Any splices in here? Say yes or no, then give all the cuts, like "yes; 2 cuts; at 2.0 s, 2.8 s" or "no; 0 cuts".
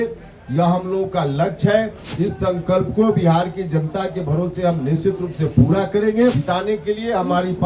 yes; 2 cuts; at 2.0 s, 6.4 s